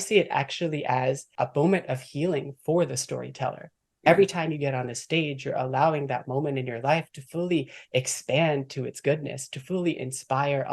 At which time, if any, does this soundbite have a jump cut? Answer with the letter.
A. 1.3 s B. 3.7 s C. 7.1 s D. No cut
A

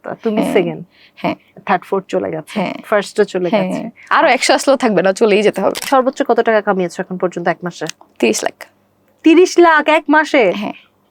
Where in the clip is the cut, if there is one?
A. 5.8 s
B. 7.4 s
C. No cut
A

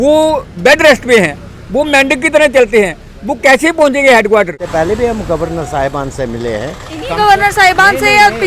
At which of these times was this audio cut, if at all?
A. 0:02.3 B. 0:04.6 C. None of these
B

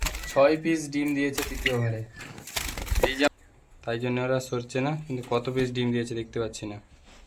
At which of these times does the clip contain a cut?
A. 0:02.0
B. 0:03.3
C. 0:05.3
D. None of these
B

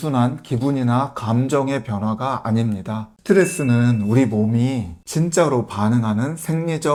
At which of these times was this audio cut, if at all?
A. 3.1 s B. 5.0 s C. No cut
C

